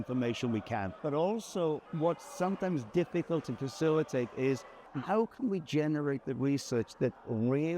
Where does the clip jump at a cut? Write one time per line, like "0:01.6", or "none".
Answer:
0:00.9
0:01.9
0:04.8